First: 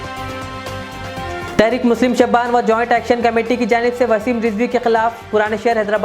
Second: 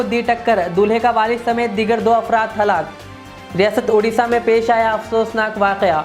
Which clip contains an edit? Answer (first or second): first